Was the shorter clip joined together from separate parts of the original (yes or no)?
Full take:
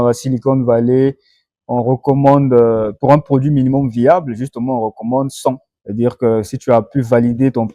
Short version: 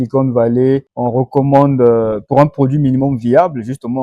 yes